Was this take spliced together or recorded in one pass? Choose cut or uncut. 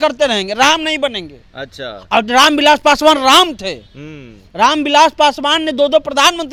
uncut